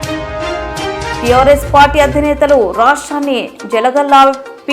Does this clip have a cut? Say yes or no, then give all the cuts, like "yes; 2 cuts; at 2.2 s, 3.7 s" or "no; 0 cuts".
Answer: yes; 1 cut; at 1.2 s